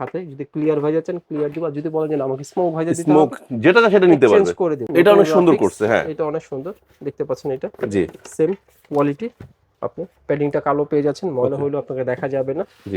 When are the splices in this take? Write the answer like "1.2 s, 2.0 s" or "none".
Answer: 4.8 s